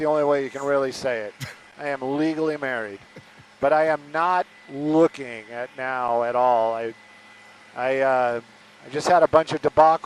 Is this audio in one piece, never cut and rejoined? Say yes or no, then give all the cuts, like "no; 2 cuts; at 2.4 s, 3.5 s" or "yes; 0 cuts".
yes; 0 cuts